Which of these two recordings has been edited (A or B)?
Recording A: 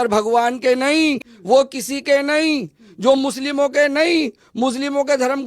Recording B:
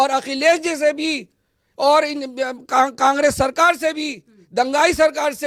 A